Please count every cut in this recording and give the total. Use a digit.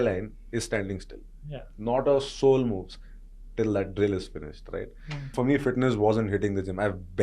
1